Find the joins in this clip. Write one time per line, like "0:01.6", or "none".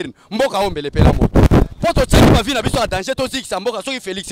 none

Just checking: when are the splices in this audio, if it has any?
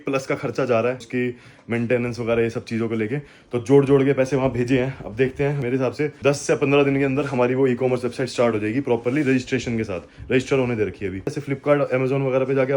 0:01.1
0:05.8
0:11.4

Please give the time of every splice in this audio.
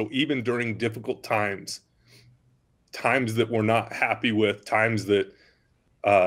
none

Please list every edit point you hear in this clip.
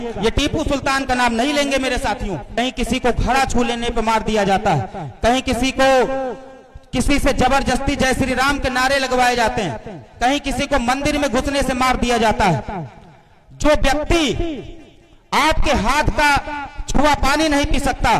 0:02.5

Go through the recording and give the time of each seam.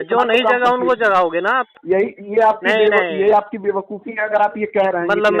0:01.7

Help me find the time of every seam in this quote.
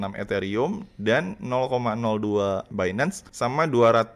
0:02.8

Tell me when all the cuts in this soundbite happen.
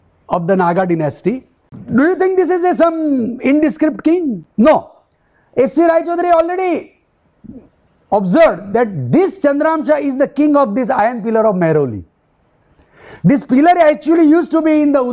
0:01.7

